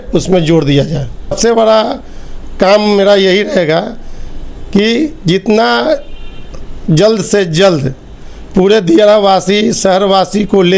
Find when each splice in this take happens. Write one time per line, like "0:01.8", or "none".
0:01.4